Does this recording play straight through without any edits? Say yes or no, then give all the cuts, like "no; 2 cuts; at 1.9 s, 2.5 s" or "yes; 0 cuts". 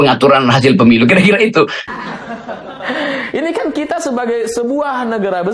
no; 1 cut; at 1.8 s